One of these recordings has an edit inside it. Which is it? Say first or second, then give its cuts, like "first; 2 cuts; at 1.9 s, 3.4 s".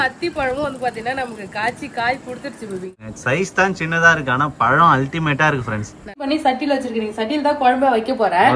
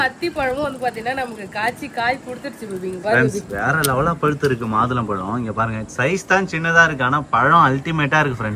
first; 2 cuts; at 3.0 s, 6.2 s